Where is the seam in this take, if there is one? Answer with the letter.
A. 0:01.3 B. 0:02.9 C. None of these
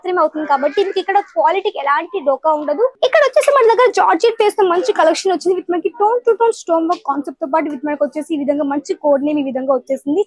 B